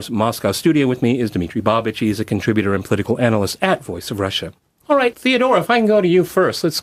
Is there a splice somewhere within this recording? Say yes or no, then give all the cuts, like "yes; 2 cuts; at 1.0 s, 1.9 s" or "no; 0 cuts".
yes; 1 cut; at 4.0 s